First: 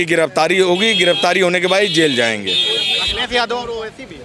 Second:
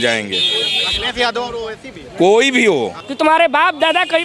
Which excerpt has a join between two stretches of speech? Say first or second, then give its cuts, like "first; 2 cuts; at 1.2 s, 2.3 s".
second; 1 cut; at 3.0 s